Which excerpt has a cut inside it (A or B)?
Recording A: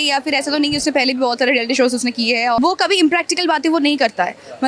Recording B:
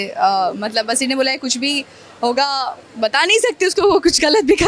A